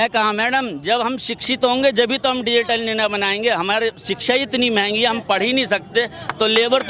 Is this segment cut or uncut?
uncut